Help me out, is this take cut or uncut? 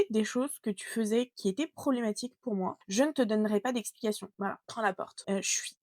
cut